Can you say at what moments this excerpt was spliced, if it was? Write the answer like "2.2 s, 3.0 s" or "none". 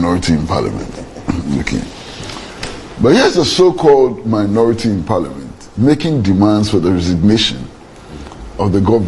none